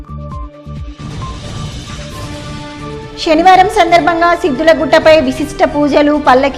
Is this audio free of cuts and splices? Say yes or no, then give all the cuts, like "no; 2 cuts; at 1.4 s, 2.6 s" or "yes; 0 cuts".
no; 1 cut; at 1.7 s